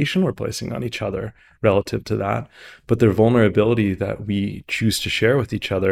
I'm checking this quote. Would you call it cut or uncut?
uncut